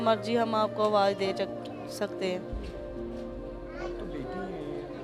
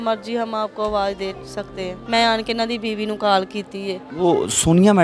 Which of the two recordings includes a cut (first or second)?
second